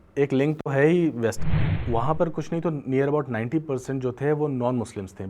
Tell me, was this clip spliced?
yes; 1 cut; at 1.4 s

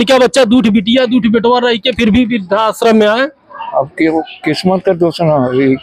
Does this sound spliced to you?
no; 0 cuts

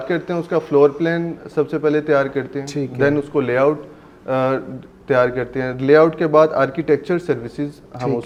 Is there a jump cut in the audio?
no; 0 cuts

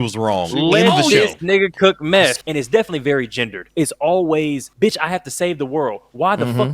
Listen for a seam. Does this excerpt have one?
yes; 3 cuts; at 2.3 s, 3.7 s, 4.7 s

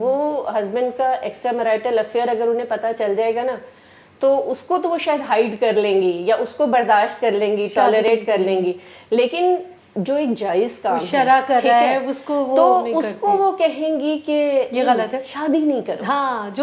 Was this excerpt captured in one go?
yes; 0 cuts

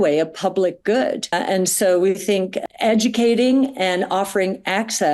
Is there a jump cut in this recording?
no; 0 cuts

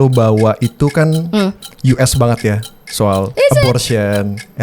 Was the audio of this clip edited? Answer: yes; 1 cut; at 1.7 s

